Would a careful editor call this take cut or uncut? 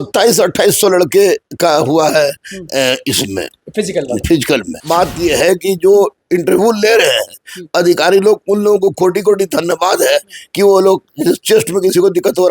cut